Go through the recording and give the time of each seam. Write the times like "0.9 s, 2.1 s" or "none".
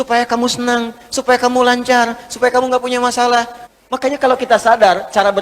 3.6 s